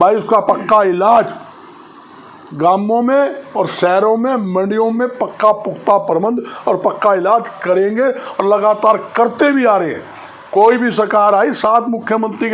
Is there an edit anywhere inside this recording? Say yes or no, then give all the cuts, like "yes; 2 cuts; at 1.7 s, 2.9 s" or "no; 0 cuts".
no; 0 cuts